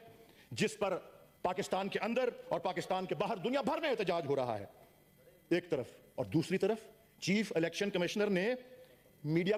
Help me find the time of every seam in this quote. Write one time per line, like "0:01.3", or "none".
none